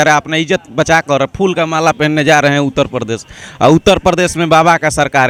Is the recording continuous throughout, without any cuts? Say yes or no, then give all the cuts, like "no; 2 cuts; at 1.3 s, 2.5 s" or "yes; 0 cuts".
yes; 0 cuts